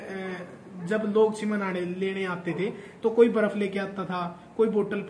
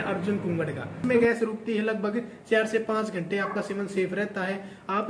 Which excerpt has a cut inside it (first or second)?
second